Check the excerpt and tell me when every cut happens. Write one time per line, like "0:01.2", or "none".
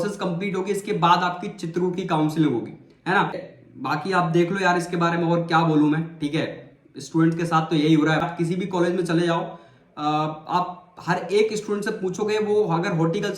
0:03.5
0:08.3